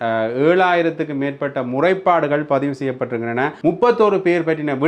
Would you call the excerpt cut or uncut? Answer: cut